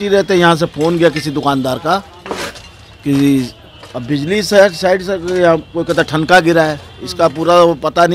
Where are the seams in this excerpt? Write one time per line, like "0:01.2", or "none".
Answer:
none